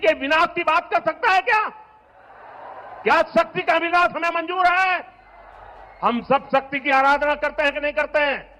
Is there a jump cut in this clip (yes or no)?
no